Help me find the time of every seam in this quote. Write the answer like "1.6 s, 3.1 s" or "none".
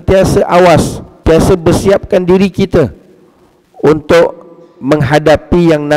1.0 s